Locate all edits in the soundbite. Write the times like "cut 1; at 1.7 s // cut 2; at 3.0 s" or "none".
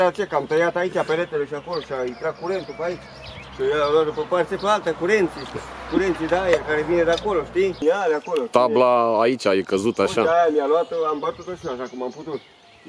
cut 1; at 7.8 s